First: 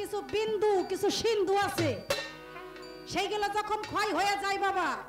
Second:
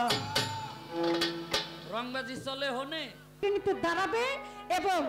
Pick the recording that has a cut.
second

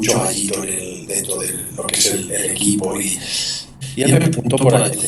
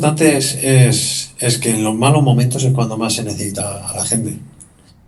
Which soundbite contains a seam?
first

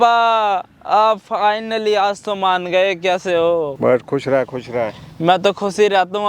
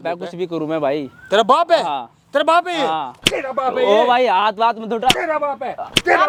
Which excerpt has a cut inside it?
first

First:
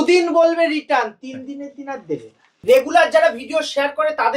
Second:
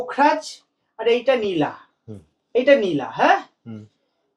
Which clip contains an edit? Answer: first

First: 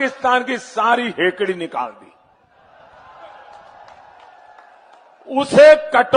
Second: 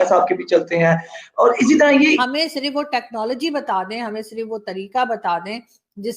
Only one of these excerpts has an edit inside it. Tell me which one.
second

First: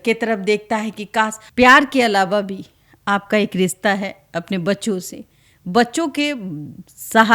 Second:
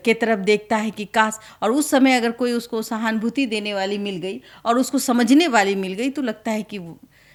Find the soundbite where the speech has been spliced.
first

